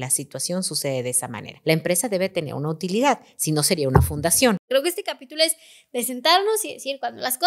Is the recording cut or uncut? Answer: cut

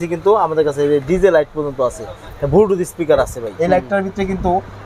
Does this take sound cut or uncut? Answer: cut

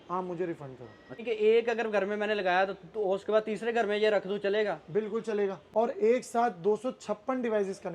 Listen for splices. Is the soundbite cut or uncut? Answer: cut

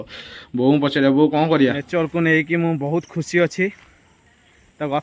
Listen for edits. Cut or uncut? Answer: cut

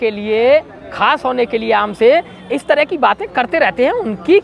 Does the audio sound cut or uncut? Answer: uncut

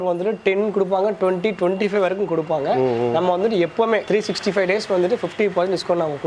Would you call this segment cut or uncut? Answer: uncut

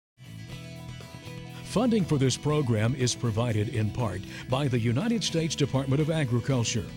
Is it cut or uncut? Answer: cut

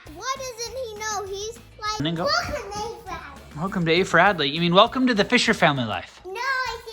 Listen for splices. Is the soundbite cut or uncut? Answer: cut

